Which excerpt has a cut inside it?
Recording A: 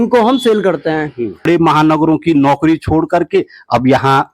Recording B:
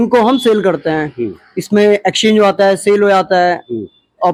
A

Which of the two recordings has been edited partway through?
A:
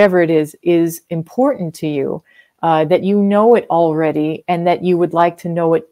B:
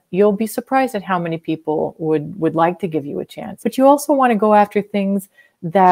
B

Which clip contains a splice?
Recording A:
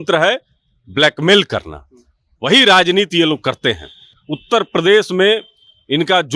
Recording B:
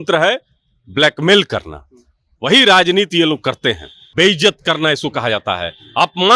B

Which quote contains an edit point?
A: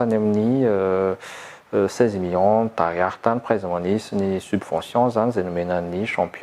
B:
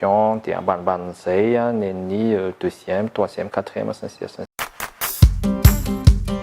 B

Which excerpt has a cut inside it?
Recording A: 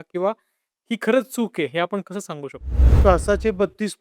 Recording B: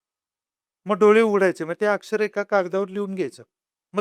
A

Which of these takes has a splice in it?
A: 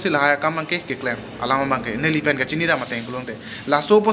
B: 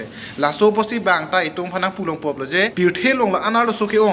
B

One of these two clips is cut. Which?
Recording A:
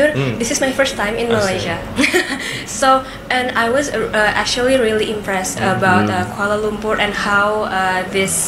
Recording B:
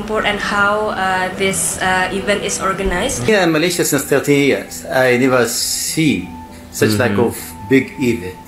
B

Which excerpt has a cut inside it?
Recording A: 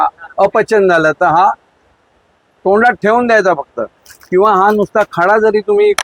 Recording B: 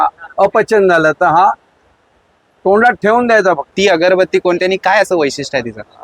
B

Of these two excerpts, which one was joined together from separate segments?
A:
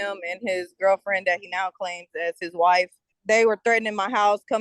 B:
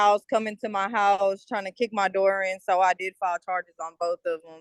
A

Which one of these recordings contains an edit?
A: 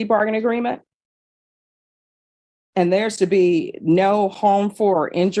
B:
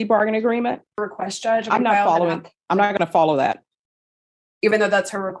B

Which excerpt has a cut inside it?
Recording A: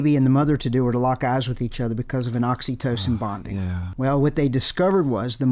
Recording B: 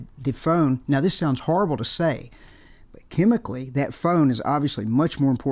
A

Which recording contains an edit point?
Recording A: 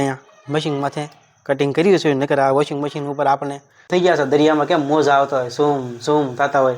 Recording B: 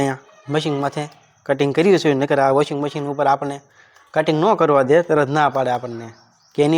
A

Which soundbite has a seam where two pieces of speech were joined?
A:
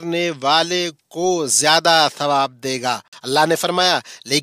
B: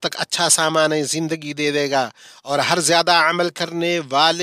A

